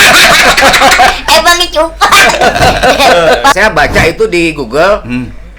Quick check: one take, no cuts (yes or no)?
no